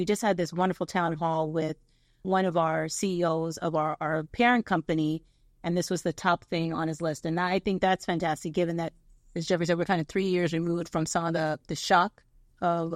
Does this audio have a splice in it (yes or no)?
yes